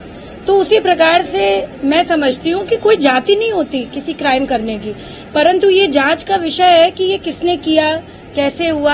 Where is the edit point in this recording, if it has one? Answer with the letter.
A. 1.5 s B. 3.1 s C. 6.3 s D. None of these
D